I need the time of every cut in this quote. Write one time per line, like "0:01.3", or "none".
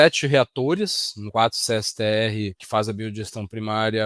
0:01.2
0:02.6